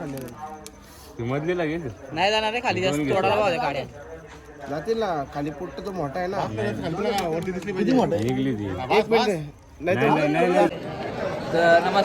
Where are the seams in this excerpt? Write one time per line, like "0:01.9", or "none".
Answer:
0:10.7